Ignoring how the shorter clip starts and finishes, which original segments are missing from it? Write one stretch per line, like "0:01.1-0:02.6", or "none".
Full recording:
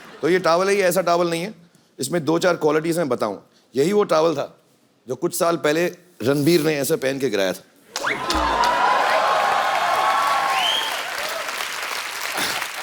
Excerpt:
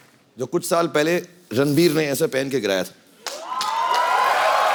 none